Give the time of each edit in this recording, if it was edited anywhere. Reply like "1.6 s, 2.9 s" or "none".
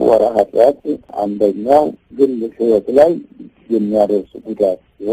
1.1 s, 2.0 s